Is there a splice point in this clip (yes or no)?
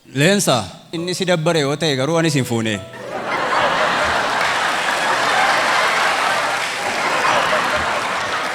yes